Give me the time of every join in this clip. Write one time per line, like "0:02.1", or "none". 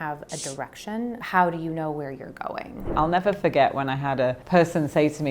0:01.2
0:02.9
0:04.4